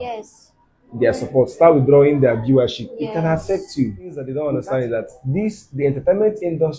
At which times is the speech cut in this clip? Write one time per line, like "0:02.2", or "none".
0:04.3